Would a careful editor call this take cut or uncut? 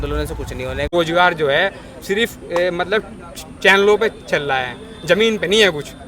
cut